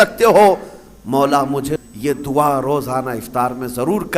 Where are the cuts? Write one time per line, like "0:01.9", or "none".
0:01.8

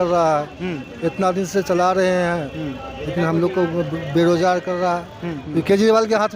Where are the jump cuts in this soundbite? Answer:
0:05.4

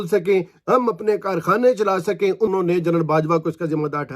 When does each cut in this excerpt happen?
0:02.5

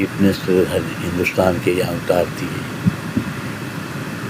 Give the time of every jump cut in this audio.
none

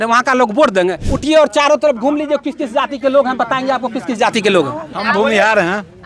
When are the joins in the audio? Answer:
0:01.0
0:05.0

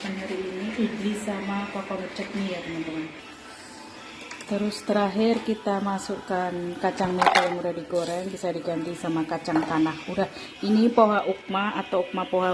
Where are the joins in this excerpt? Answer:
0:03.1

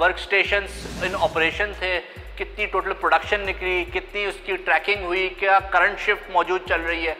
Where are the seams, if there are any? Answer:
none

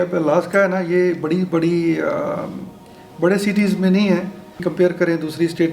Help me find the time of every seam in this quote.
0:04.7

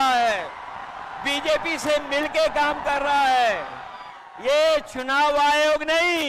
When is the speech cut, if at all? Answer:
none

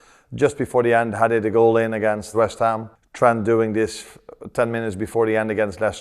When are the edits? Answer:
none

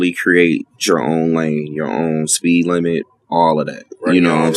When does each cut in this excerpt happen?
none

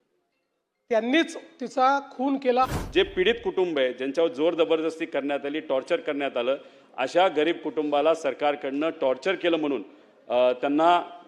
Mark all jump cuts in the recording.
0:02.7

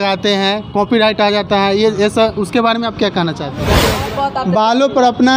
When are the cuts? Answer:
0:03.9

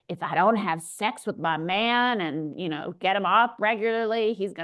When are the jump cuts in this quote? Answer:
none

